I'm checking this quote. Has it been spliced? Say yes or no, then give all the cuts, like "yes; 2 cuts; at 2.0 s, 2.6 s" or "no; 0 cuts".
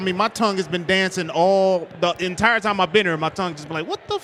no; 0 cuts